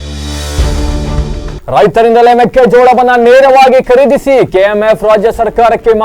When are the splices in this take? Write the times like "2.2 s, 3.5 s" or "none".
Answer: 1.5 s

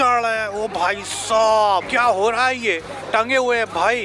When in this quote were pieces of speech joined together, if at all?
1.9 s, 2.9 s

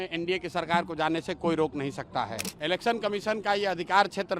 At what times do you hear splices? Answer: 2.4 s

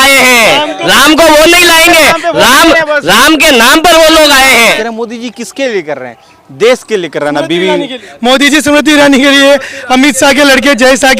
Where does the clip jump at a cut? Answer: 4.8 s, 8.0 s

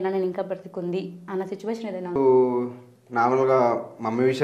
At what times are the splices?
2.2 s

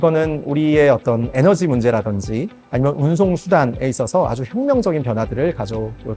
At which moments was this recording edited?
none

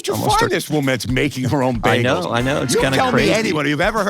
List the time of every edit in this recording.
none

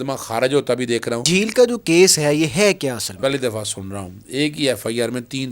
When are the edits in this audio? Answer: 1.2 s, 3.1 s

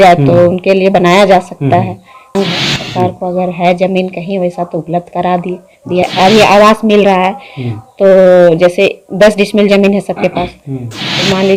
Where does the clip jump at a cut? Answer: 2.3 s, 6.0 s

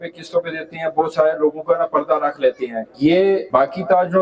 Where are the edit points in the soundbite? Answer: 2.8 s, 3.4 s

